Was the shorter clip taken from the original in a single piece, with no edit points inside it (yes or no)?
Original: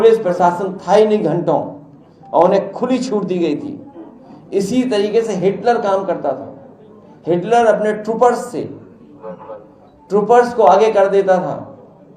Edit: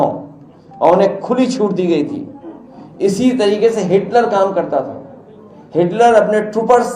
yes